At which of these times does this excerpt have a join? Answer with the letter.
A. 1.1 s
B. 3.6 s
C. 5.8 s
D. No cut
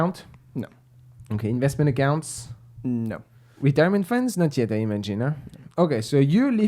B